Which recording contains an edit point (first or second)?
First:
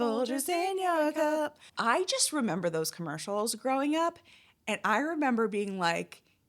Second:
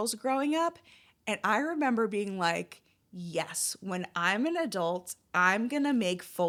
first